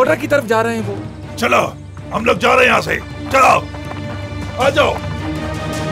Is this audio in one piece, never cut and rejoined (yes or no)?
no